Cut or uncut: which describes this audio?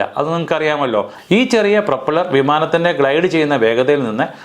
cut